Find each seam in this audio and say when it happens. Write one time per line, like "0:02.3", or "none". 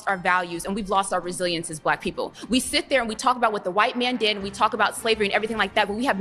none